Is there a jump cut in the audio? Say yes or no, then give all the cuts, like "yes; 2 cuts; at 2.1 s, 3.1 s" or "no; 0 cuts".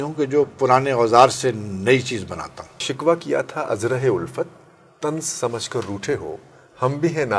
yes; 1 cut; at 2.8 s